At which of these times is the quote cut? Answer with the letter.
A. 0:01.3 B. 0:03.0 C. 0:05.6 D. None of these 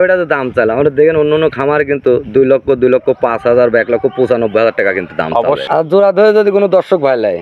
C